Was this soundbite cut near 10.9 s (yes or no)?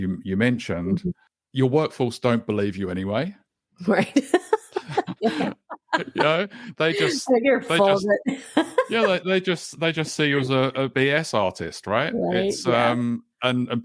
yes